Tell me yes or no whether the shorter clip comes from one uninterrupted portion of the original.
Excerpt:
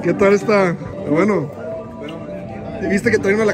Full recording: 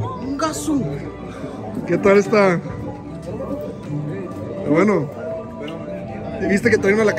no